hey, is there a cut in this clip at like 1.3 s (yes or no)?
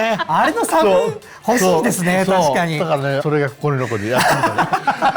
no